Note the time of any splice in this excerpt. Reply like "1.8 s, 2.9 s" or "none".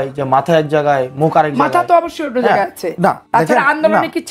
3.2 s